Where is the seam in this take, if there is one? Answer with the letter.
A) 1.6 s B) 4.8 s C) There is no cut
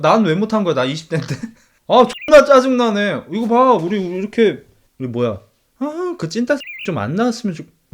B